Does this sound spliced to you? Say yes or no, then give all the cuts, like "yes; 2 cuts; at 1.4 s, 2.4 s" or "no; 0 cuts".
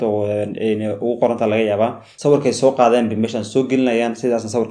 yes; 1 cut; at 2.1 s